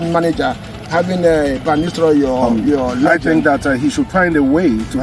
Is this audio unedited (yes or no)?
no